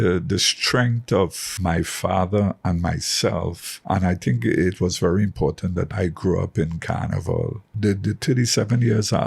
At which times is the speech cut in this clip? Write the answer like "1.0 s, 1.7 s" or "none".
1.5 s, 3.7 s, 5.9 s, 7.6 s